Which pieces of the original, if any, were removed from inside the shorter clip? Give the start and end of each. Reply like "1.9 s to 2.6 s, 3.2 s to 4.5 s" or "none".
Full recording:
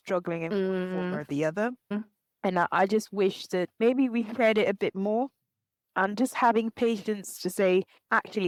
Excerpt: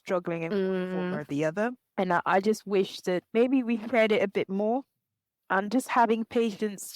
1.8 s to 2.3 s

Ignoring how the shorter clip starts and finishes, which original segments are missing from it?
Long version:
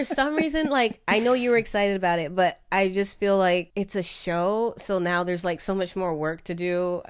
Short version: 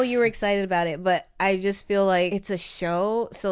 3.6 s to 3.8 s

